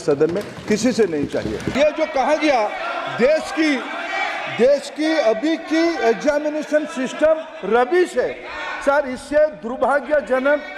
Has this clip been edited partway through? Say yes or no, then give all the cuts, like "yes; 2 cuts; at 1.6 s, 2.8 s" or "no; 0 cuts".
yes; 1 cut; at 1.7 s